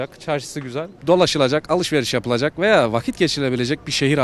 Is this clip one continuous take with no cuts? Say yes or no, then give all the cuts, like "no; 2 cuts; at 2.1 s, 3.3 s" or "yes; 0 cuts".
no; 1 cut; at 0.9 s